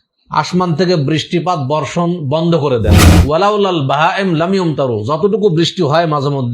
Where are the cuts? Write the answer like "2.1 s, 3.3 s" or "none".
3.1 s